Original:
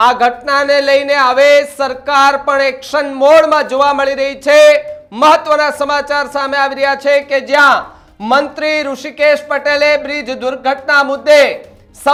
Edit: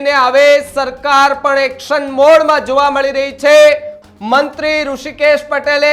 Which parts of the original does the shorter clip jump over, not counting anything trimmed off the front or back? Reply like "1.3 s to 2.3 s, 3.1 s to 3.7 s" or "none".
5.0 s to 8.0 s